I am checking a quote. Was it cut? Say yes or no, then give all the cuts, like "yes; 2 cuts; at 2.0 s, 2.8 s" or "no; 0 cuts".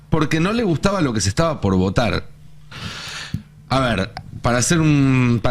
no; 0 cuts